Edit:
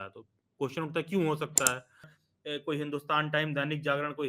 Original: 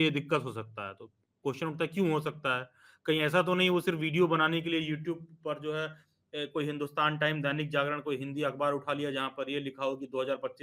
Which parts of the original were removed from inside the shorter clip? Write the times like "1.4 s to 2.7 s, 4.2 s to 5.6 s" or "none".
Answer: 2.9 s to 6.0 s